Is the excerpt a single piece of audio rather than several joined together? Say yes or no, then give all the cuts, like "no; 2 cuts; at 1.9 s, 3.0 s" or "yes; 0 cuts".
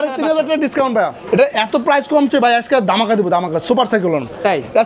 no; 1 cut; at 1.2 s